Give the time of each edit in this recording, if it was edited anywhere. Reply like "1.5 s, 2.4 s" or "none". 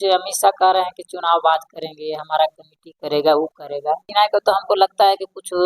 4.1 s